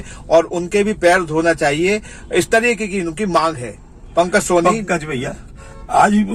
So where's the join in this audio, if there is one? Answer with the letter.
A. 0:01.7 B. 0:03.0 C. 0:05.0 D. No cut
D